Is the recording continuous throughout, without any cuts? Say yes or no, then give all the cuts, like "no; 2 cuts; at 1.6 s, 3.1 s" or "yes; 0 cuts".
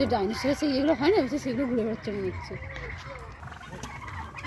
no; 1 cut; at 3.6 s